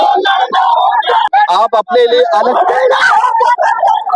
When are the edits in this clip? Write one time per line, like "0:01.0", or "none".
0:01.3